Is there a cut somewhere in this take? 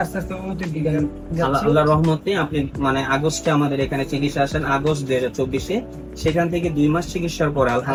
no; 0 cuts

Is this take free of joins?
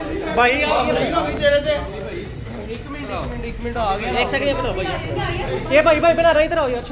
yes; 0 cuts

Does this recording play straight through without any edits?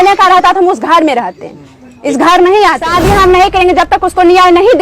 no; 1 cut; at 2.8 s

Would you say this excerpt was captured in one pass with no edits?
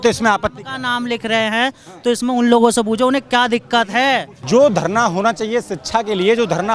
no; 1 cut; at 4.3 s

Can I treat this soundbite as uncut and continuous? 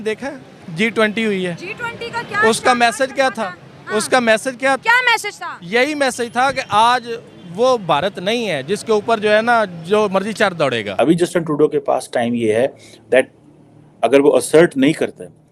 no; 1 cut; at 10.9 s

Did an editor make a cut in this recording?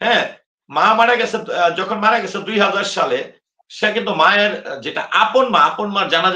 no; 0 cuts

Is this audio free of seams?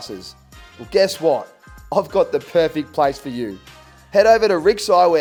yes; 0 cuts

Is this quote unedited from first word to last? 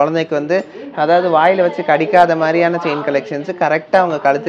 yes; 0 cuts

